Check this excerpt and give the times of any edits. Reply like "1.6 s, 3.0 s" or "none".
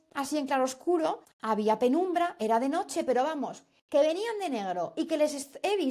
1.3 s